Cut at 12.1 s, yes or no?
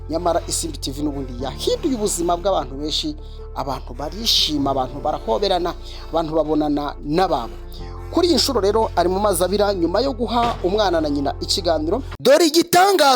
yes